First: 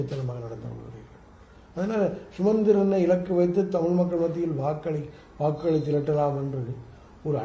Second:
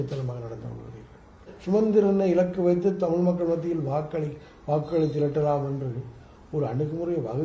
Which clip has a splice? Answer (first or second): second